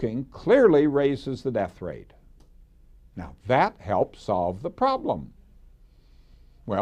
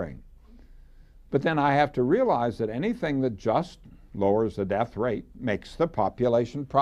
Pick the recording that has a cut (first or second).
second